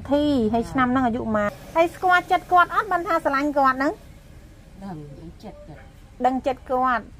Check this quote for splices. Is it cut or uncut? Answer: cut